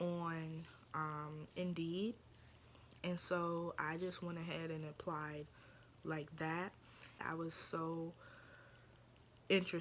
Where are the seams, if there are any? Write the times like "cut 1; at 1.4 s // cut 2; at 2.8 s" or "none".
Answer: cut 1; at 7.2 s